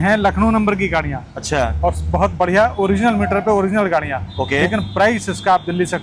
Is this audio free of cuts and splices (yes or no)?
yes